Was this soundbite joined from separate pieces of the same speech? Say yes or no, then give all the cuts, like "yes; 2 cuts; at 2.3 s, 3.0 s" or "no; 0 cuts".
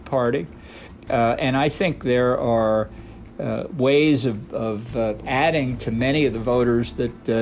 no; 0 cuts